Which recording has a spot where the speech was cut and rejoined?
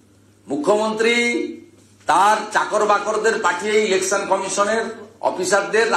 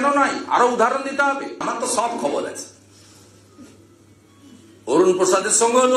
second; 1 cut; at 1.6 s

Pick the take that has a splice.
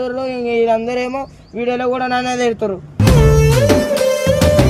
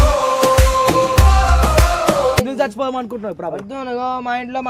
second; 1 cut; at 2.4 s

